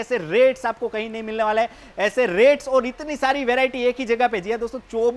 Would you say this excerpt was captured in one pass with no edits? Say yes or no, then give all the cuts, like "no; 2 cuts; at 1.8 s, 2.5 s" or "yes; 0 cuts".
yes; 0 cuts